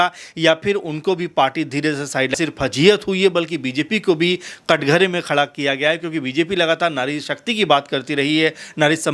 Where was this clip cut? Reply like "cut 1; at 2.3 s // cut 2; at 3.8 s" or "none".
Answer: cut 1; at 2.3 s